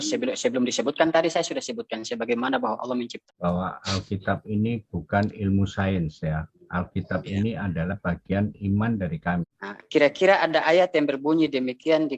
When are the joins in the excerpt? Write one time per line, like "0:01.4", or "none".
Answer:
0:03.3
0:09.5